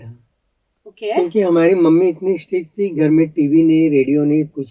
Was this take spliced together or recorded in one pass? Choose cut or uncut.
uncut